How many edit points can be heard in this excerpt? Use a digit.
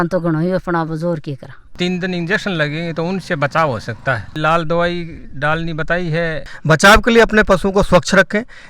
3